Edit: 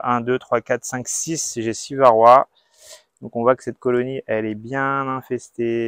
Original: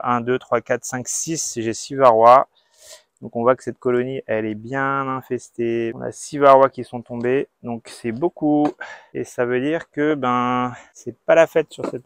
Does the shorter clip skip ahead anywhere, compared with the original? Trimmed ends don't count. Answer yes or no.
no